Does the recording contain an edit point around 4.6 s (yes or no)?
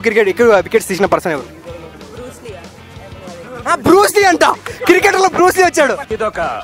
no